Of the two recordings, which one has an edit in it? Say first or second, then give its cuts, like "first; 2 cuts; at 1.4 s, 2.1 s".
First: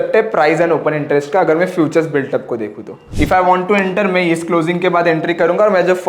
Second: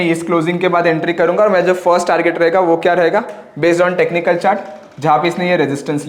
first; 1 cut; at 3.0 s